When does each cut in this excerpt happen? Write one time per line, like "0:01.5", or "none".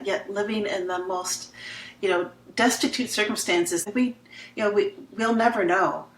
0:03.9